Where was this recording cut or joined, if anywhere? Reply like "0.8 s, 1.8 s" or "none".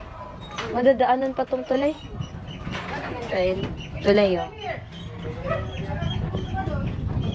none

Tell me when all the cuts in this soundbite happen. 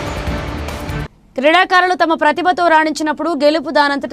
1.0 s

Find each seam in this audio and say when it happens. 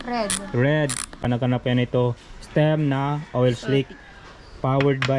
1.2 s

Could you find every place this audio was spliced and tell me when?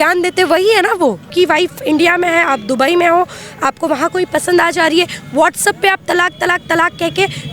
1.2 s

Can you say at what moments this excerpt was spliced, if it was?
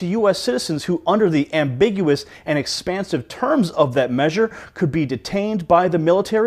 1.4 s

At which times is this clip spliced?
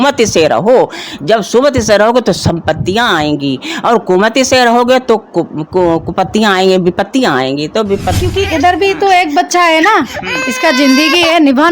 8.2 s

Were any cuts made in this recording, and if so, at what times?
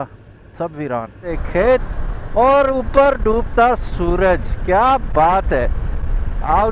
1.4 s

